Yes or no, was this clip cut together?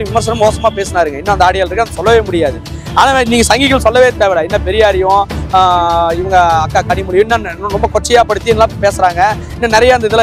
no